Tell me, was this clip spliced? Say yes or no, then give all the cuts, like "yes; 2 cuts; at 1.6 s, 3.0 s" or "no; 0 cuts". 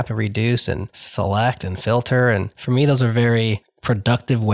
yes; 3 cuts; at 1.0 s, 2.5 s, 3.7 s